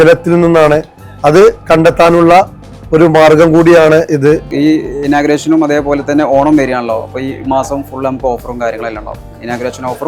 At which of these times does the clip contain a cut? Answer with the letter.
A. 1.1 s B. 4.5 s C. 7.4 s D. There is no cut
B